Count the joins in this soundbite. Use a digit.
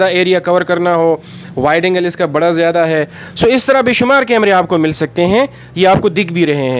0